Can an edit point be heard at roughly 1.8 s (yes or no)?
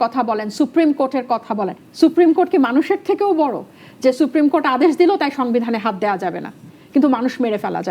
yes